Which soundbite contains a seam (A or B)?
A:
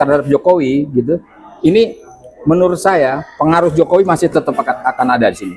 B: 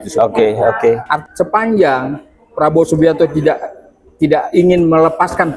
B